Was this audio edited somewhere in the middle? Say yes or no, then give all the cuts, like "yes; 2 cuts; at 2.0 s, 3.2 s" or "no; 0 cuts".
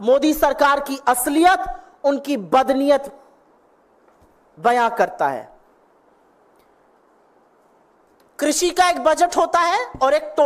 no; 0 cuts